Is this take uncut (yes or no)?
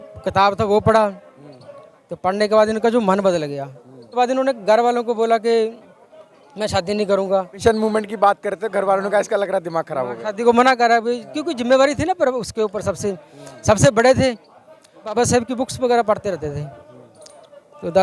no